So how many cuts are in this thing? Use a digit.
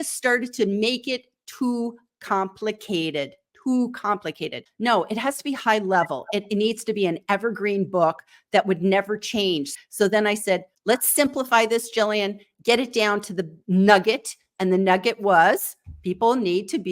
3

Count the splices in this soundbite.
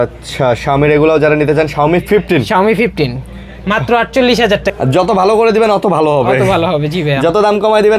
1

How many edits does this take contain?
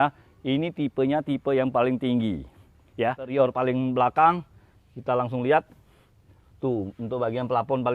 1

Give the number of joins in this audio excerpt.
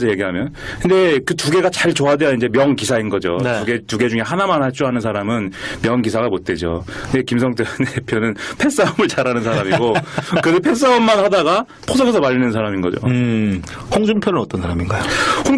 1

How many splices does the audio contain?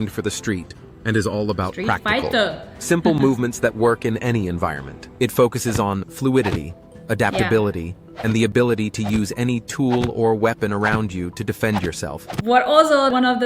2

